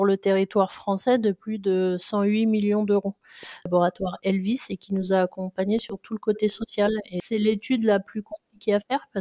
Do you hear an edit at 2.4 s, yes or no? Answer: no